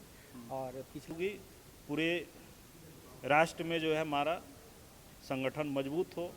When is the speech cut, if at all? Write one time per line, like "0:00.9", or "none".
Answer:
0:01.1